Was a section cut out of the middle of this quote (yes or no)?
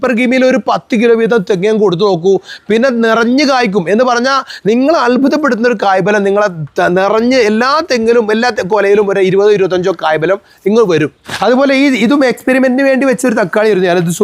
no